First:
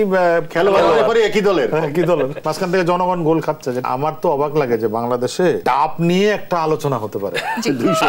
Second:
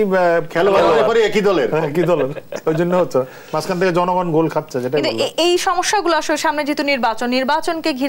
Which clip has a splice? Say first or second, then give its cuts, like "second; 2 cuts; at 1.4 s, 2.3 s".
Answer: first; 3 cuts; at 2.4 s, 3.8 s, 5.6 s